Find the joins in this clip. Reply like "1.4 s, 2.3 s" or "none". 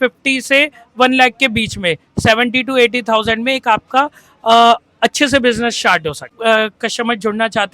6.3 s